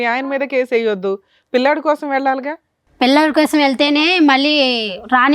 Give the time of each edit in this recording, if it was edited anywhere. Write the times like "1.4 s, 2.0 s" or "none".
none

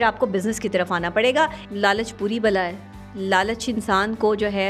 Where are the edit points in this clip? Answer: 1.6 s

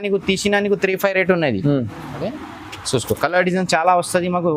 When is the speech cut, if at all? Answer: 2.3 s

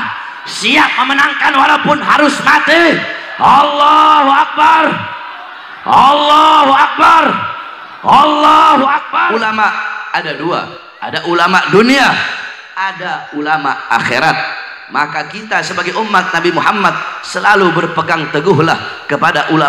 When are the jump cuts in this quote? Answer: 9.3 s

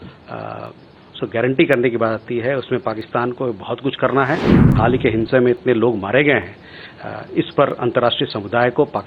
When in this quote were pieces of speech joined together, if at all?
4.7 s

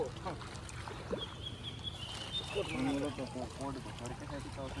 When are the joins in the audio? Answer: none

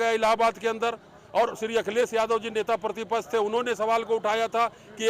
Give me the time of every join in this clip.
none

